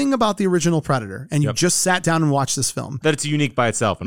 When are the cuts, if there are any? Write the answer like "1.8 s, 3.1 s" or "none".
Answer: 2.9 s